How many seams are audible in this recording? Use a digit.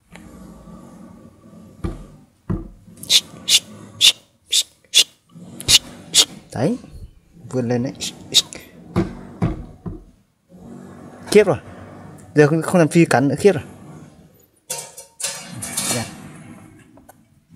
1